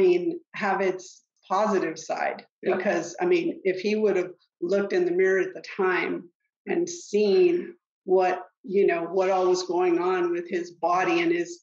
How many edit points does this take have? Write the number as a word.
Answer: one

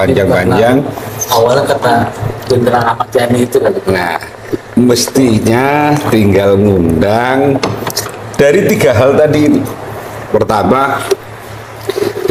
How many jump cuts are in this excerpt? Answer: zero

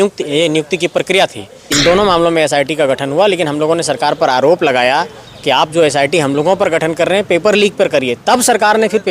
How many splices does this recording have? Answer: one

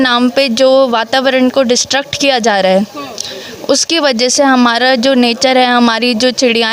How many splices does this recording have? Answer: zero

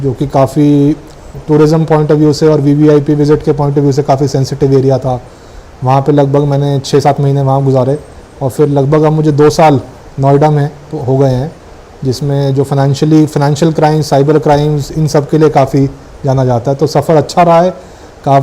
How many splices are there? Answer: zero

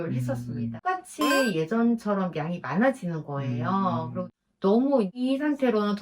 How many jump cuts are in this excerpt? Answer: three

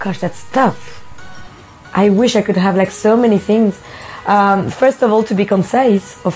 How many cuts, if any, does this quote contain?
zero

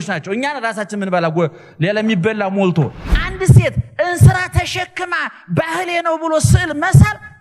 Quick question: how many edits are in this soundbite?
one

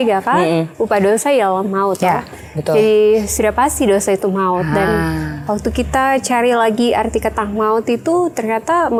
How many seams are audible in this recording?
zero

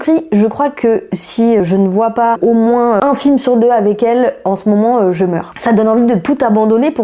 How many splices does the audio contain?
two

